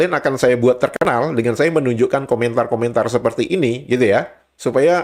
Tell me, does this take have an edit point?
no; 0 cuts

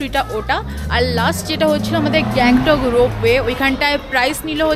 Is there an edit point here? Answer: no; 0 cuts

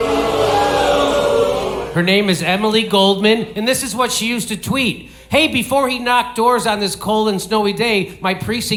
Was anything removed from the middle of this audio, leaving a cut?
no; 0 cuts

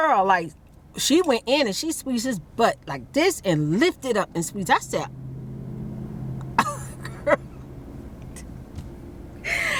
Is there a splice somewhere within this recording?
no; 0 cuts

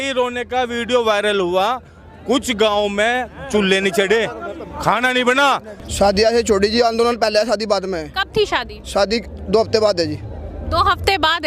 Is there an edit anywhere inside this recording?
yes; 1 cut; at 5.8 s

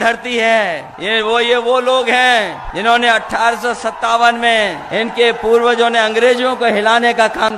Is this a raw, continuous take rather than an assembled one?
no; 3 cuts; at 0.9 s, 2.6 s, 4.8 s

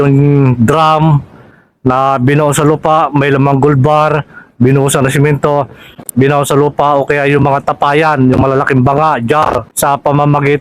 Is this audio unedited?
no; 1 cut; at 9.7 s

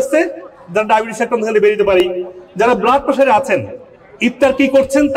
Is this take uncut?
yes; 0 cuts

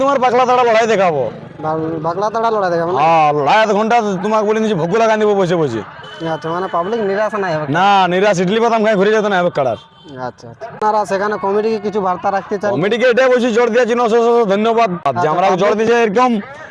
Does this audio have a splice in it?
yes; 2 cuts; at 10.8 s, 15.0 s

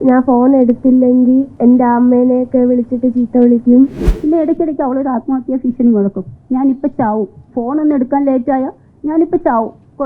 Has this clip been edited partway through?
yes; 2 cuts; at 1.5 s, 4.1 s

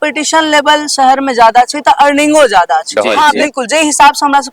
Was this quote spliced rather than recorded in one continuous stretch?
yes; 1 cut; at 2.9 s

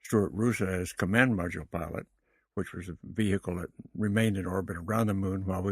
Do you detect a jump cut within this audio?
yes; 1 cut; at 4.5 s

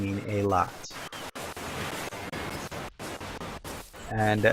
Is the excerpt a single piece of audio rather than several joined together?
yes; 0 cuts

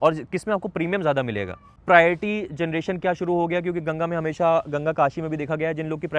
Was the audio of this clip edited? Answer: yes; 1 cut; at 1.6 s

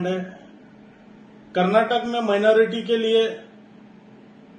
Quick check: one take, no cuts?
yes; 0 cuts

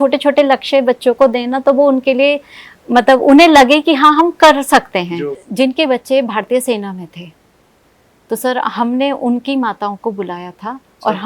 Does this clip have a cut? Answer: yes; 1 cut; at 5.4 s

